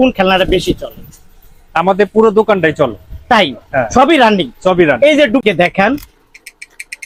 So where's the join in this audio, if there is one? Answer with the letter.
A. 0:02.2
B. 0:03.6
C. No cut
C